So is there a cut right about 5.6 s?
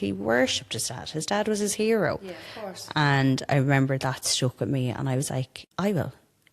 yes; 1 cut; at 5.6 s

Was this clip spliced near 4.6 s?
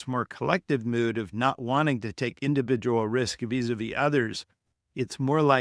no; 0 cuts

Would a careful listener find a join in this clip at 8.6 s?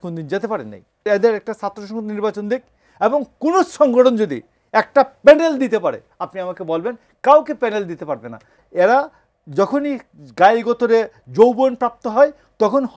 yes; 2 cuts; at 1.1 s, 8.6 s

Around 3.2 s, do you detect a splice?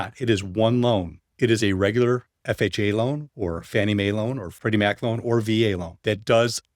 no; 3 cuts; at 1.2 s, 4.5 s, 5.9 s

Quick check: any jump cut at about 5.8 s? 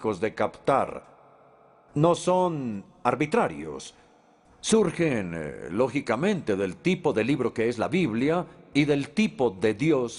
no; 0 cuts

